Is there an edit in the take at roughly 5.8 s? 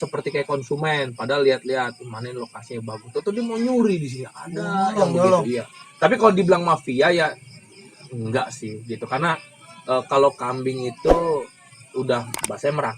no; 0 cuts

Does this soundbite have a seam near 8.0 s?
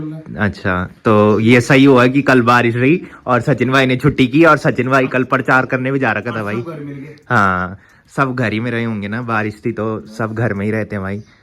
no; 0 cuts

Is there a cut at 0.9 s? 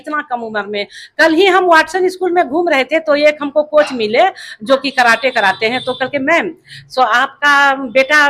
no; 0 cuts

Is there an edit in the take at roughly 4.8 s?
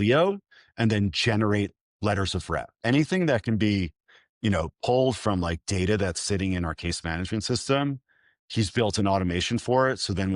no; 1 cut; at 2.8 s

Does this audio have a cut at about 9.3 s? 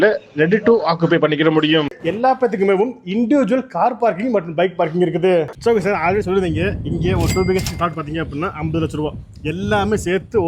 no; 2 cuts; at 1.9 s, 5.5 s

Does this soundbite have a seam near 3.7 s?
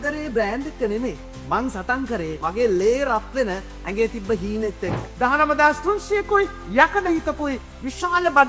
no; 2 cuts; at 2.4 s, 5.0 s

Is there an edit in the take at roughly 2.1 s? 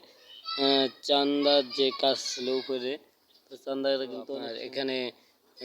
no; 1 cut; at 4.5 s

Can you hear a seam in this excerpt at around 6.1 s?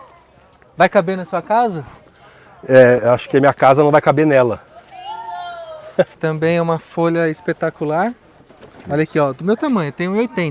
yes; 1 cut; at 6.1 s

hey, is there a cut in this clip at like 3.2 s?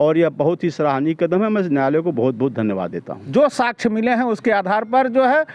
yes; 1 cut; at 3.2 s

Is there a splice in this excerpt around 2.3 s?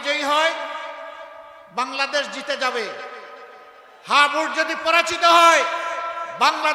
no; 0 cuts

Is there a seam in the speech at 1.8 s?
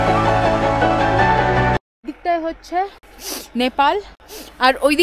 yes; 1 cut; at 1.8 s

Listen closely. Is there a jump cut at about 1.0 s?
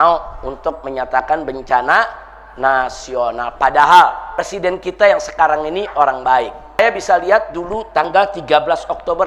no; 3 cuts; at 4.3 s, 6.8 s, 8.1 s

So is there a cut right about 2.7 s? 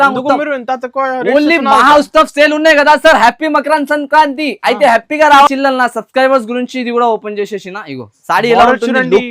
no; 1 cut; at 5.5 s

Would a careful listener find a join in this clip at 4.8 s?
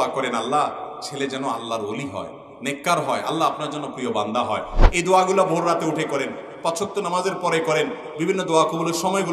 yes; 1 cut; at 4.8 s

